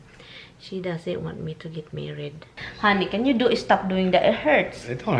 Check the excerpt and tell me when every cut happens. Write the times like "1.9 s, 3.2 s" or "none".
2.6 s